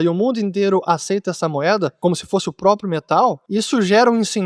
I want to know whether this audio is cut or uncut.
cut